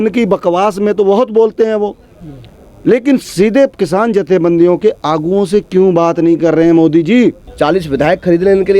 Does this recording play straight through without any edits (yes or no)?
no